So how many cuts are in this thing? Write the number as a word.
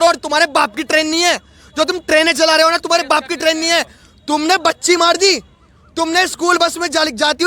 zero